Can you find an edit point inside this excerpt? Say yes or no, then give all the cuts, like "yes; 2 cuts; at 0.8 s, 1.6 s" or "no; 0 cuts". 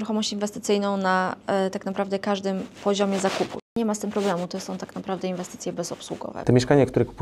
yes; 2 cuts; at 3.8 s, 6.4 s